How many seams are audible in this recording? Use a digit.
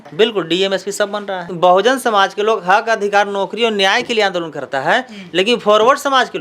1